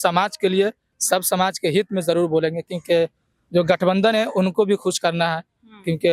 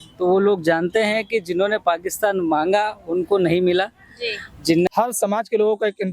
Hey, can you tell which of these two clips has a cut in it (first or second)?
second